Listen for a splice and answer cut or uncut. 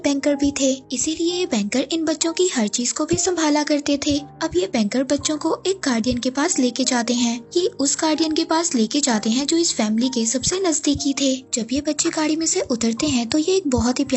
uncut